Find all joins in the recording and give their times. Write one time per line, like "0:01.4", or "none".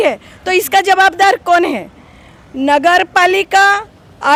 none